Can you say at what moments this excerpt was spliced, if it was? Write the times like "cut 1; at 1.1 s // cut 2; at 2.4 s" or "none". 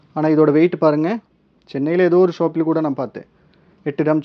cut 1; at 1.3 s